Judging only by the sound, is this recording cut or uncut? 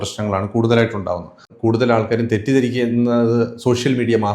cut